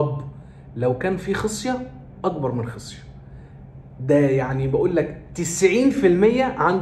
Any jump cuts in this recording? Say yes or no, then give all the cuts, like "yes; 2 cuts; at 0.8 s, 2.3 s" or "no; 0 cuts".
no; 0 cuts